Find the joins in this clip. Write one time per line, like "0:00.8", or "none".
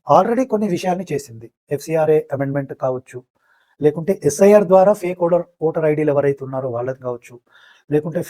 none